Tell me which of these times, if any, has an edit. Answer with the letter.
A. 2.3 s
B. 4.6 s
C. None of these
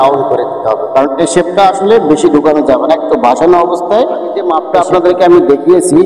B